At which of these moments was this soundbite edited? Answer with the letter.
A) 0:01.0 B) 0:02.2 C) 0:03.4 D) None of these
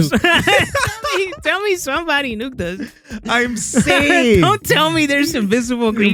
D